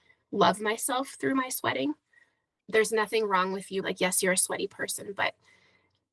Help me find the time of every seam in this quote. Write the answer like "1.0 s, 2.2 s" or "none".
2.5 s